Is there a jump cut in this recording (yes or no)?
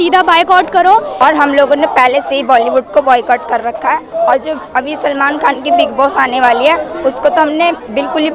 yes